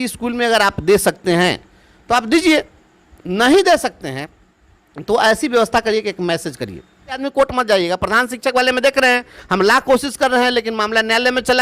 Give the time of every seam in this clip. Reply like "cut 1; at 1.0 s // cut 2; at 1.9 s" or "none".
cut 1; at 7.2 s

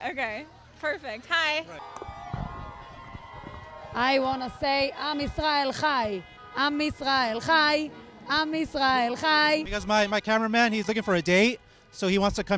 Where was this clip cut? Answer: cut 1; at 1.8 s // cut 2; at 9.7 s

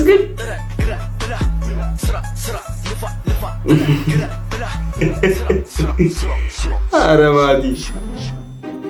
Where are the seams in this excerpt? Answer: none

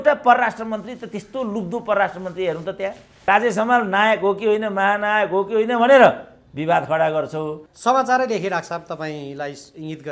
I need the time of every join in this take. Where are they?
cut 1; at 3.1 s // cut 2; at 7.6 s

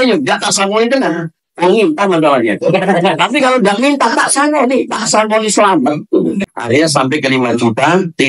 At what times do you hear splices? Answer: cut 1; at 6.5 s

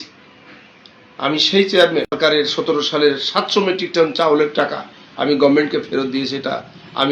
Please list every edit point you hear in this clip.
cut 1; at 2.2 s

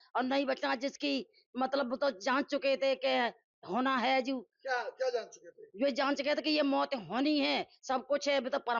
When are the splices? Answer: none

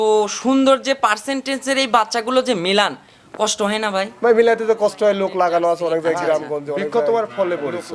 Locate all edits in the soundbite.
cut 1; at 6.8 s

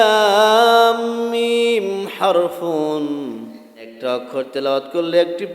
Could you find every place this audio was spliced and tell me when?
cut 1; at 3.9 s

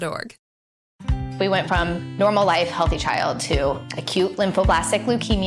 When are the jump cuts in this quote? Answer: cut 1; at 0.9 s

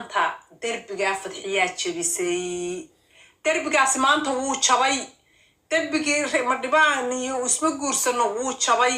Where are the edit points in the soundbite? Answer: none

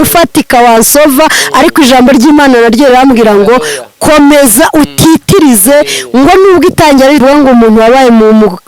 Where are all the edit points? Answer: cut 1; at 7.2 s

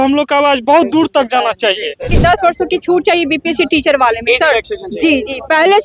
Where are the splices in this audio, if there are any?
cut 1; at 2.1 s

